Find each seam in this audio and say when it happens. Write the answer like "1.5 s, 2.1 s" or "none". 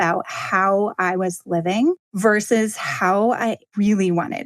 2.1 s, 3.7 s